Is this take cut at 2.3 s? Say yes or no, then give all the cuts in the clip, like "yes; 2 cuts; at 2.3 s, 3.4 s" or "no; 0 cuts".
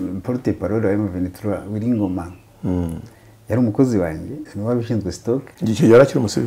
no; 2 cuts; at 4.5 s, 5.5 s